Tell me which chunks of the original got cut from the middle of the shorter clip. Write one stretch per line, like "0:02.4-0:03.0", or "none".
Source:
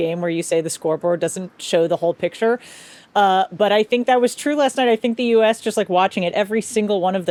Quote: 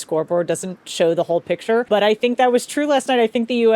0:02.6-0:03.5